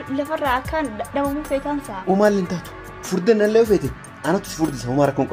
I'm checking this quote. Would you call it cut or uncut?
cut